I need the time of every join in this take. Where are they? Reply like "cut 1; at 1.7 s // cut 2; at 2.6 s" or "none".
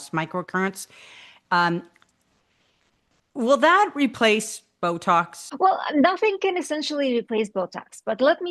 cut 1; at 5.4 s